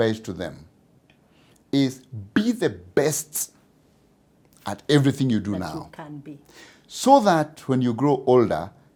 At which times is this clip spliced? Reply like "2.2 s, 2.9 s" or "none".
none